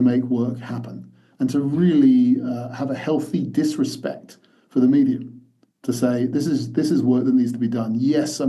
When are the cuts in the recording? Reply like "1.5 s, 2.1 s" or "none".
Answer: none